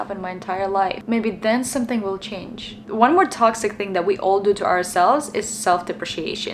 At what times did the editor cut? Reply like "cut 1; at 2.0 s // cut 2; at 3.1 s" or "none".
none

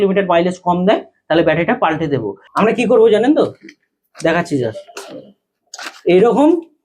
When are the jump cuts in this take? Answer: cut 1; at 2.3 s

